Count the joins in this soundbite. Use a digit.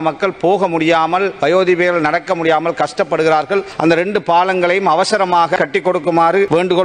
1